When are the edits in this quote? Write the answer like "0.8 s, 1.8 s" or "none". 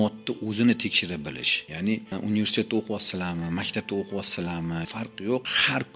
1.9 s, 4.8 s